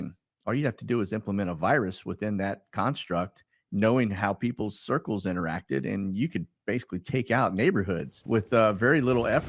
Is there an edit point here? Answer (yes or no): yes